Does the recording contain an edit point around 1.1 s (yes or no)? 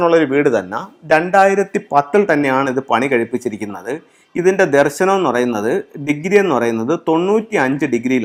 no